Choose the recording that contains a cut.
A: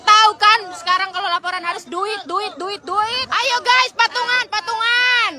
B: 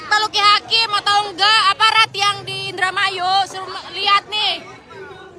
A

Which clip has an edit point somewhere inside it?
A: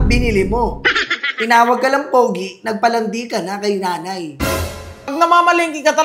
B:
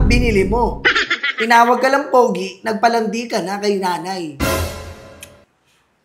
A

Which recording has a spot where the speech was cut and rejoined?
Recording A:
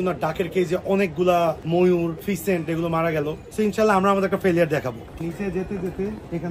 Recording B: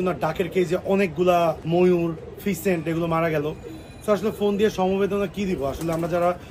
A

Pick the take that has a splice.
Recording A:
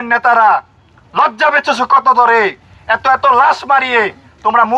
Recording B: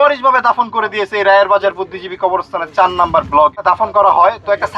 B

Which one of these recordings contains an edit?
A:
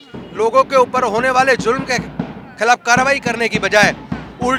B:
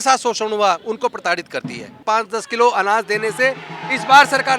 B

